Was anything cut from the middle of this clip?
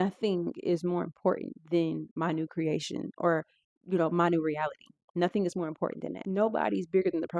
yes; 1 cut; at 6.2 s

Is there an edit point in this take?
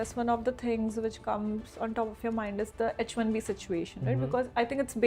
no; 0 cuts

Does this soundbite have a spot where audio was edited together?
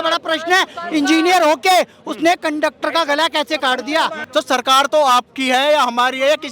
yes; 1 cut; at 4.2 s

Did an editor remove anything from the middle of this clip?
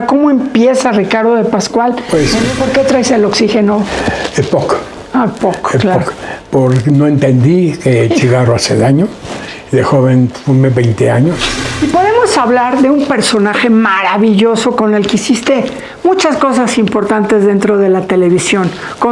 yes; 2 cuts; at 2.5 s, 11.6 s

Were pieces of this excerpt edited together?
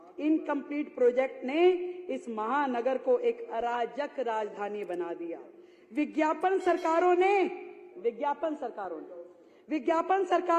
no; 0 cuts

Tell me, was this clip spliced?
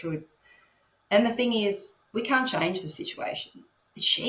no; 0 cuts

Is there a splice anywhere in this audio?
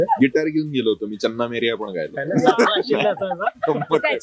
no; 0 cuts

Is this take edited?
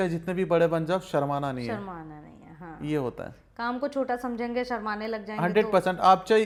no; 0 cuts

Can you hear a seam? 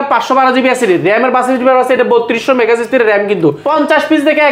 yes; 1 cut; at 3.6 s

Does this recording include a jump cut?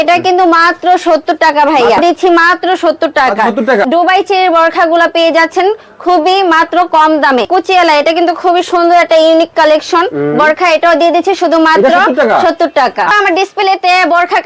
yes; 4 cuts; at 2.0 s, 3.8 s, 7.5 s, 13.1 s

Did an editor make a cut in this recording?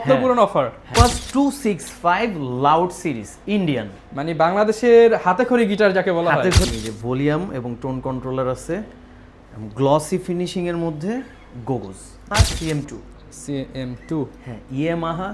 yes; 3 cuts; at 0.9 s, 6.7 s, 12.3 s

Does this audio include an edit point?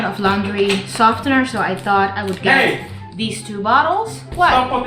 no; 0 cuts

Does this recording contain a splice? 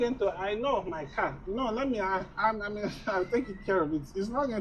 yes; 1 cut; at 3.0 s

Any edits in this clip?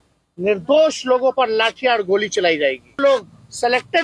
yes; 1 cut; at 3.0 s

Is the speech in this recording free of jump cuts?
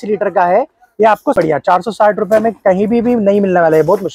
no; 1 cut; at 1.3 s

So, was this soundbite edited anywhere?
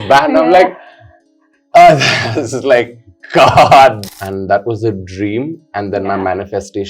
yes; 1 cut; at 4.0 s

